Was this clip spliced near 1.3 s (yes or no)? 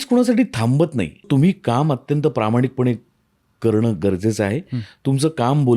yes